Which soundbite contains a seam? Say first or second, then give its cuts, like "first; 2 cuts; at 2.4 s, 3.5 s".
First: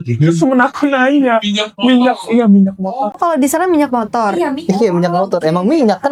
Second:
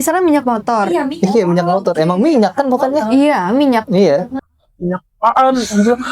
second; 1 cut; at 4.4 s